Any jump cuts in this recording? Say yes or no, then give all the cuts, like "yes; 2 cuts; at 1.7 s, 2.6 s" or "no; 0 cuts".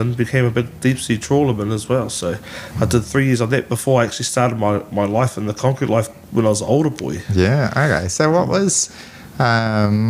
no; 0 cuts